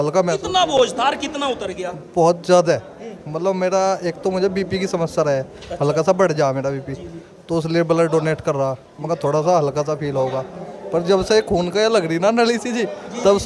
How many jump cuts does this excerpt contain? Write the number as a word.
zero